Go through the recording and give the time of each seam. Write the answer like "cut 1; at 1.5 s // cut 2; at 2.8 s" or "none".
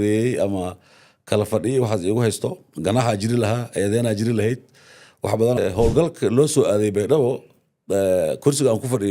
cut 1; at 5.6 s